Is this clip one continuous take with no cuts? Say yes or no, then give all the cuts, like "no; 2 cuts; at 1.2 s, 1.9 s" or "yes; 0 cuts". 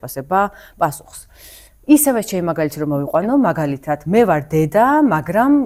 yes; 0 cuts